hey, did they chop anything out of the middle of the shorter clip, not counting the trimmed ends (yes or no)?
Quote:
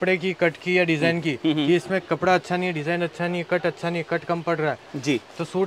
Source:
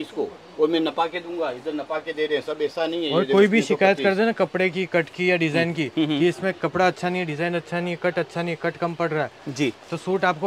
no